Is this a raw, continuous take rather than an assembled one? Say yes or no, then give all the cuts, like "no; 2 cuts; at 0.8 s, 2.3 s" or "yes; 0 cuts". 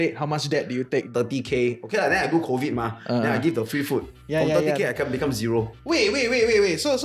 no; 1 cut; at 1.1 s